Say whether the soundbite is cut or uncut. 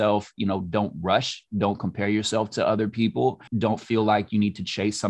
cut